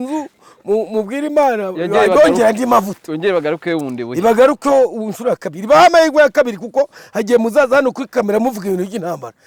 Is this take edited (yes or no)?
no